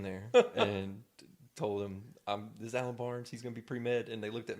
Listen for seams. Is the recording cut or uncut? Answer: uncut